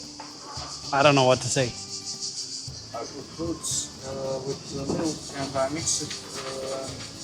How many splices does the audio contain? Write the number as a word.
one